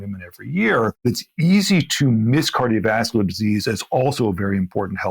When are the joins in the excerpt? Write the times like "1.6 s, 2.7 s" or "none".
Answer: 1.0 s